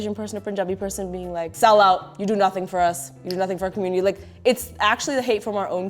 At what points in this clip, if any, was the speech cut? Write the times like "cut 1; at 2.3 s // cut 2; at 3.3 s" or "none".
cut 1; at 1.5 s

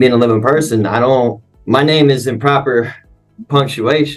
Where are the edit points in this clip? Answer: cut 1; at 1.5 s

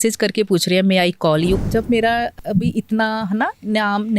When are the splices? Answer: cut 1; at 1.6 s // cut 2; at 2.4 s

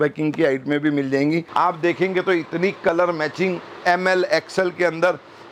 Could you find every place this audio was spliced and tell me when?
cut 1; at 1.5 s

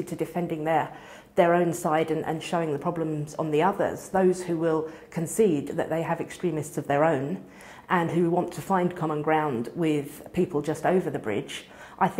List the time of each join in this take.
none

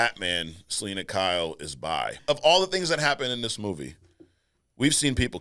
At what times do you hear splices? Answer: cut 1; at 2.2 s

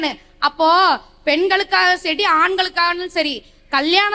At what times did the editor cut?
none

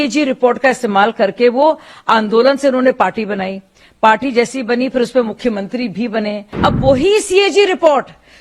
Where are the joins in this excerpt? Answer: cut 1; at 6.5 s

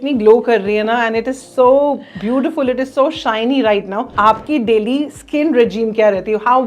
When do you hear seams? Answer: cut 1; at 4.1 s

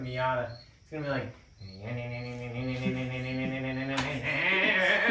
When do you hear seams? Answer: none

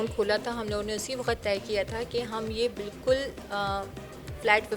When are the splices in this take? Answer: none

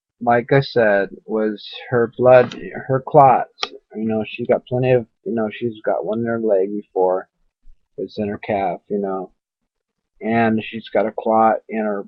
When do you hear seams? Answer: cut 1; at 4.5 s

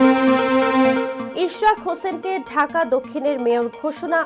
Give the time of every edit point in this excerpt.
cut 1; at 1.2 s

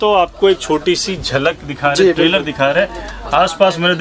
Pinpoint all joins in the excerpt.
none

